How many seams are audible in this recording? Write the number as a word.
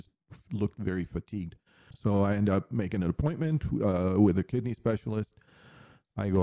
one